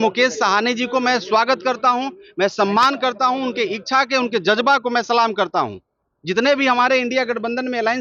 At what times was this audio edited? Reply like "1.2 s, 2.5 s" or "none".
none